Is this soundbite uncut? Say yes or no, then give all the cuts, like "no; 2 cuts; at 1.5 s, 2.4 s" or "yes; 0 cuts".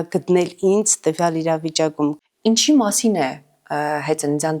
no; 1 cut; at 2.2 s